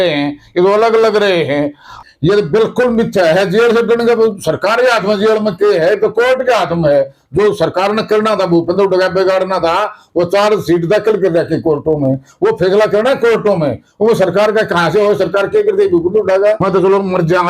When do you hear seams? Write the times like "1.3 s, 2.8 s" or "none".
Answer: 2.0 s, 12.0 s, 16.6 s

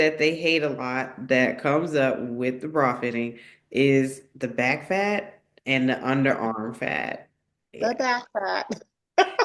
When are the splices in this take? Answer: none

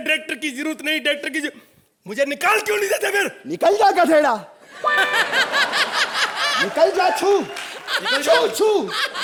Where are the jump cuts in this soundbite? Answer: none

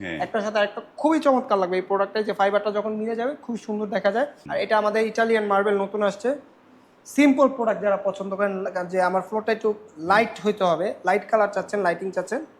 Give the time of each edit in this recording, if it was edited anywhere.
4.4 s

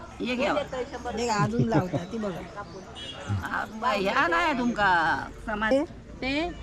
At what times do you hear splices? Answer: 5.7 s

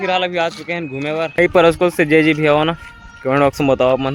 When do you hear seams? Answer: 1.4 s

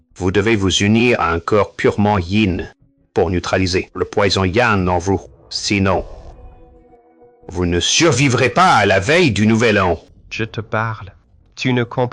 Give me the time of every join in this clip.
10.2 s

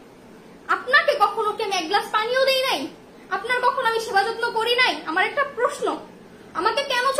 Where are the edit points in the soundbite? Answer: none

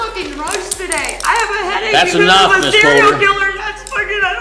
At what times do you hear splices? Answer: none

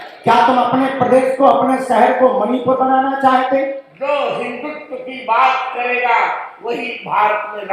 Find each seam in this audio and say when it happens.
3.9 s

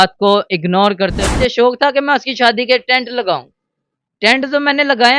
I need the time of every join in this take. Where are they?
1.3 s

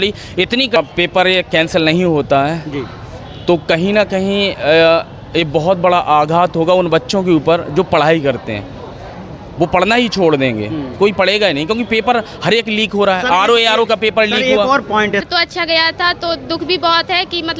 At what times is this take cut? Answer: 0.8 s, 15.2 s

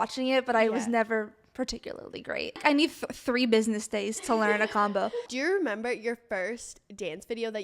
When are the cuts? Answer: 2.6 s, 5.2 s

